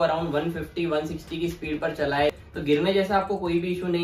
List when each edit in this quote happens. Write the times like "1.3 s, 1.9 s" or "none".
2.4 s